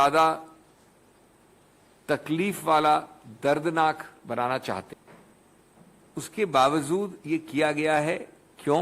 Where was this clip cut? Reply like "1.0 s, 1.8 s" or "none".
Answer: 4.9 s